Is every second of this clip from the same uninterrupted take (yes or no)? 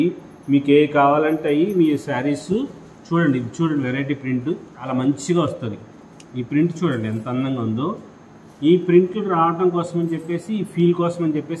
yes